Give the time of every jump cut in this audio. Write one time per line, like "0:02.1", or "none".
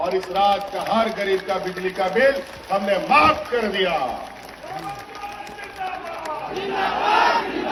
none